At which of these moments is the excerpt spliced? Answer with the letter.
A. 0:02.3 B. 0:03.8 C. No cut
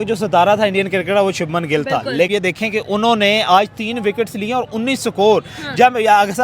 A